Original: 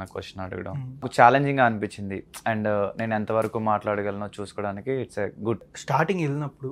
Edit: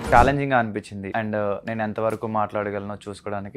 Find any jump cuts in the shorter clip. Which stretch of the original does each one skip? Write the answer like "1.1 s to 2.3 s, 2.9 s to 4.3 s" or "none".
2.1 s to 2.3 s